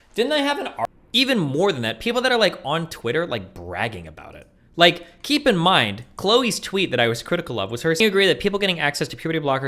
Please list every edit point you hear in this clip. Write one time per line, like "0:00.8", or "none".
0:00.9
0:08.0